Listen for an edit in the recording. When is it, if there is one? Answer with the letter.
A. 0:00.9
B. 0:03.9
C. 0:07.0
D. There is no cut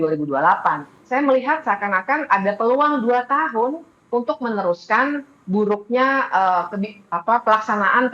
A